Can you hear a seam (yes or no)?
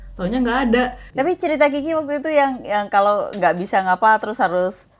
yes